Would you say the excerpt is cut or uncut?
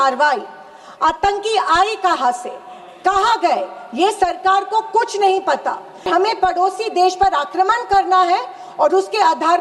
cut